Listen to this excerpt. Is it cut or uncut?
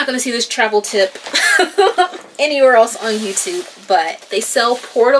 cut